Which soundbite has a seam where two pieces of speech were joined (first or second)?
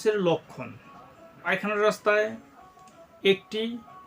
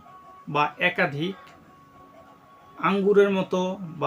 first